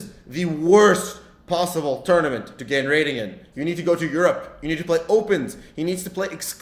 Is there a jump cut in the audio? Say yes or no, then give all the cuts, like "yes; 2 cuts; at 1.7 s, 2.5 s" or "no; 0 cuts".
no; 0 cuts